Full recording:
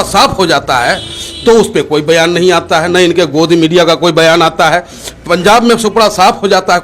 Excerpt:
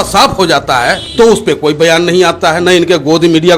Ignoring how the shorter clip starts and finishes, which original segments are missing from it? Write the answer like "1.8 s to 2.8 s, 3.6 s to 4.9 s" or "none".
1.0 s to 1.3 s